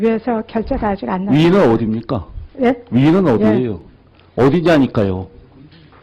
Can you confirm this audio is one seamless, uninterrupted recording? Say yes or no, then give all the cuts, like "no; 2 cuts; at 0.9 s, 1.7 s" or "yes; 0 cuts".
yes; 0 cuts